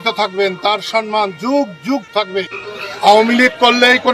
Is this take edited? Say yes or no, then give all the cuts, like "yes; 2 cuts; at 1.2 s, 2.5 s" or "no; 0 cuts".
yes; 1 cut; at 3.1 s